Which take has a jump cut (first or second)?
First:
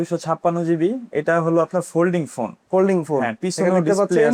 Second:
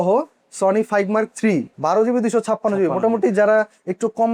second